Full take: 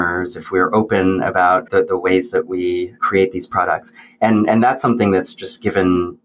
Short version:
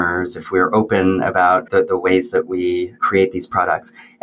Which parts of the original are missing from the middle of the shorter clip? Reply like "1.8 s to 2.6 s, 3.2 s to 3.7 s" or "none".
none